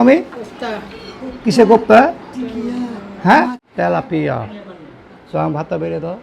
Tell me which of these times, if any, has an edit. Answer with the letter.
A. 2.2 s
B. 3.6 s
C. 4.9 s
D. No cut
B